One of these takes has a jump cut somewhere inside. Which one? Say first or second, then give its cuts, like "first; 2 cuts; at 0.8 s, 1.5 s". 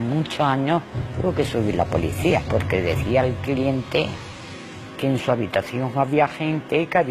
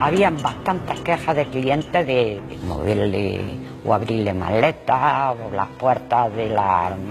second; 1 cut; at 2.4 s